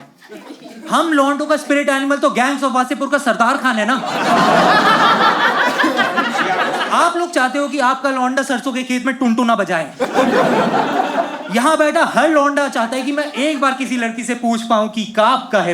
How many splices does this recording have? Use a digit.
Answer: 1